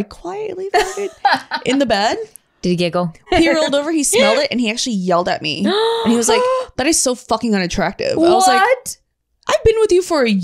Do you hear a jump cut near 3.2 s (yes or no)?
yes